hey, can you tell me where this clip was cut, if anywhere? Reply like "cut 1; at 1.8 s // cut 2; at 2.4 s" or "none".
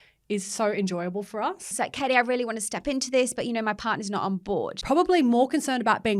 cut 1; at 1.7 s // cut 2; at 4.8 s